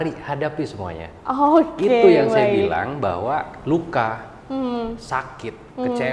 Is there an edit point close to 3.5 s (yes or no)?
yes